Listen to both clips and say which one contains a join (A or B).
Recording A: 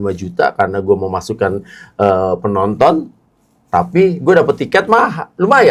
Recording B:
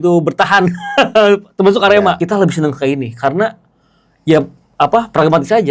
B